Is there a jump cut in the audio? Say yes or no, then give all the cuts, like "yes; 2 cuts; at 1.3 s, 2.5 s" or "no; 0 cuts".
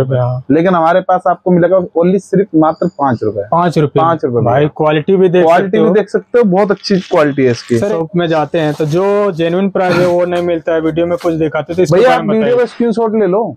yes; 1 cut; at 7.9 s